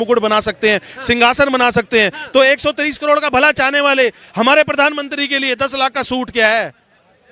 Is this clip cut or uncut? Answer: uncut